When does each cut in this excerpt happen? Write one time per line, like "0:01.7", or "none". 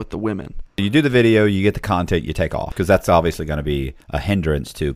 0:00.8
0:02.6